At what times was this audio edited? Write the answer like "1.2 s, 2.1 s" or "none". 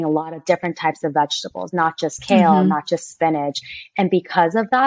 none